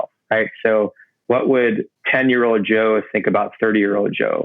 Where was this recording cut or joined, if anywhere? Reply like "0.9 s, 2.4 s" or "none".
1.1 s, 2.0 s